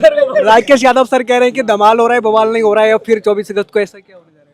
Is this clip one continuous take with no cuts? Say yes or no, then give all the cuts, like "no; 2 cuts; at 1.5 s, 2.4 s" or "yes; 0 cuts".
yes; 0 cuts